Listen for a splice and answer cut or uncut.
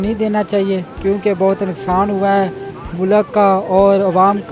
uncut